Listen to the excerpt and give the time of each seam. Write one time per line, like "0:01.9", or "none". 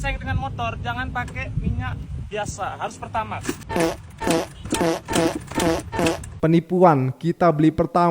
0:03.6
0:06.3